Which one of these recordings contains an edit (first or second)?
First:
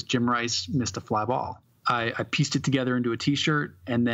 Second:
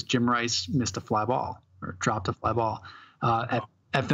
first